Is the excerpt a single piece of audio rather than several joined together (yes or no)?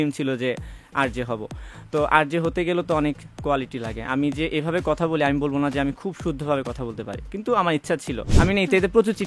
no